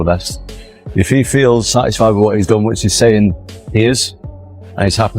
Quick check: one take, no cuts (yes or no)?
no